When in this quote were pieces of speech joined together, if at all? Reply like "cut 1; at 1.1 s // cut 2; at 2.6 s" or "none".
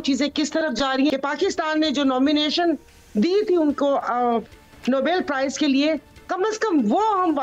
none